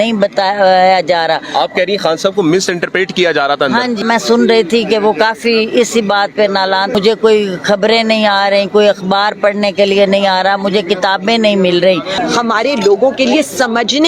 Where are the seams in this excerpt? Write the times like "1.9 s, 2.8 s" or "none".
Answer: 4.0 s, 6.9 s, 12.2 s